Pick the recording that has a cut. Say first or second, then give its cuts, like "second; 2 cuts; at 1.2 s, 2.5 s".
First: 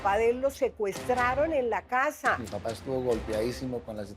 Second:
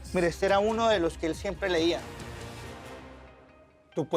first; 1 cut; at 2.5 s